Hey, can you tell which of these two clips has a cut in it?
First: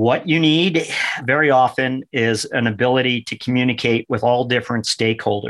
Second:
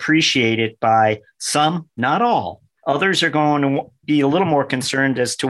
first; 1 cut; at 1.2 s

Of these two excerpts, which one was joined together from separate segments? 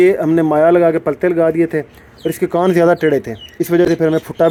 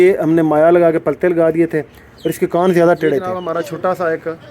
second; 1 cut; at 3.4 s

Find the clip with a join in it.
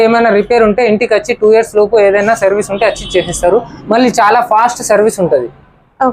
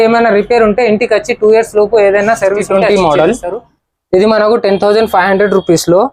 second; 1 cut; at 2.7 s

